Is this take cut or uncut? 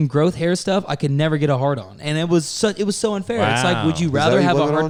uncut